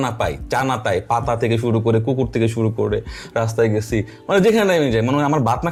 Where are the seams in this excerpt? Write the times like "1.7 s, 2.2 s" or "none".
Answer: none